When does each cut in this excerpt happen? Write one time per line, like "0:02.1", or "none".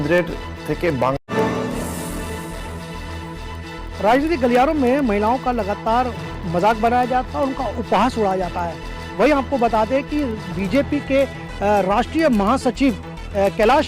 0:01.3